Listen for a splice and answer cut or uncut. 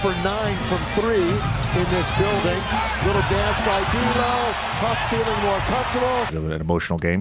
cut